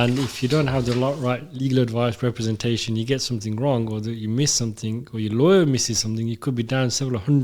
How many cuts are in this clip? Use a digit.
0